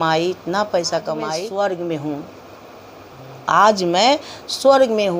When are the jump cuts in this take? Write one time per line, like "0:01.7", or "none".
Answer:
0:01.4